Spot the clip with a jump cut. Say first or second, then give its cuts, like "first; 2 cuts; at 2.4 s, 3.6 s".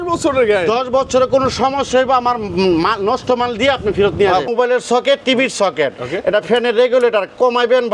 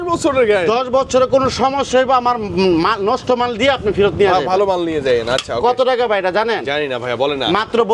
first; 1 cut; at 4.5 s